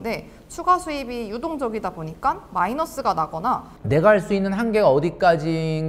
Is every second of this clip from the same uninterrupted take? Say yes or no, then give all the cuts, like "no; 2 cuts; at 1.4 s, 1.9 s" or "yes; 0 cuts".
no; 1 cut; at 3.7 s